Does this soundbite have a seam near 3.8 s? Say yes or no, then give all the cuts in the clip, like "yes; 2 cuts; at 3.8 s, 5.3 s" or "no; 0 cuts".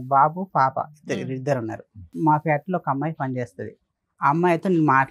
no; 1 cut; at 2.1 s